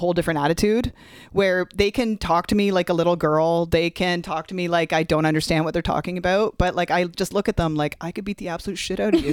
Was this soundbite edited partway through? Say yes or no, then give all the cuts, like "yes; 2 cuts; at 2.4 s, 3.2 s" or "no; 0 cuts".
no; 0 cuts